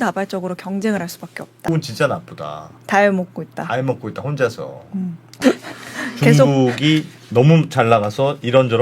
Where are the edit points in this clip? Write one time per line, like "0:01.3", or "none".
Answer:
0:01.7